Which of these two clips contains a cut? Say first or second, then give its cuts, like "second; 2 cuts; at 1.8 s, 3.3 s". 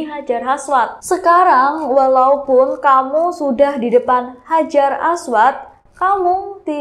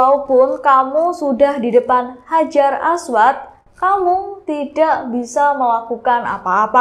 first; 1 cut; at 1.0 s